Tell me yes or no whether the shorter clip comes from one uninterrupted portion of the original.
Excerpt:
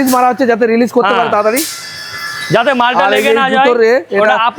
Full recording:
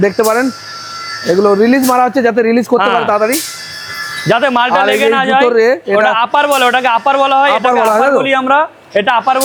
yes